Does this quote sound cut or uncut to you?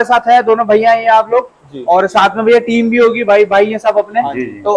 uncut